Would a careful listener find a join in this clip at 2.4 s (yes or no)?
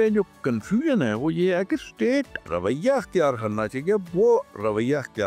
yes